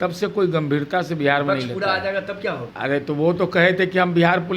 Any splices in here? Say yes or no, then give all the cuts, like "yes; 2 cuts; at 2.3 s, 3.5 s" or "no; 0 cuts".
yes; 1 cut; at 2.7 s